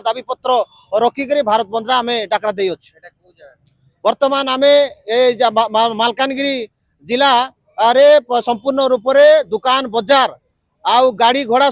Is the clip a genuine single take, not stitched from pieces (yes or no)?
yes